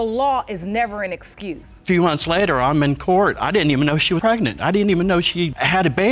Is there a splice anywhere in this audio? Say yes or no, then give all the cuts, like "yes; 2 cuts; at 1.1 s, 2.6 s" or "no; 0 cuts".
yes; 1 cut; at 1.8 s